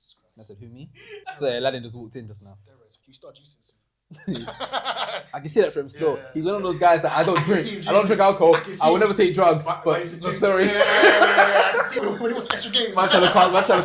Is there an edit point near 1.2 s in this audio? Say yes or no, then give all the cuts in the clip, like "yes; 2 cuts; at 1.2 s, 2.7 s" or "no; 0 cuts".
yes; 3 cuts; at 1.2 s, 3.0 s, 12.0 s